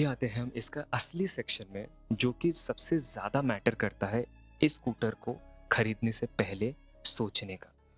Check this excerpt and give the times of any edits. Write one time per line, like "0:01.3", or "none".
none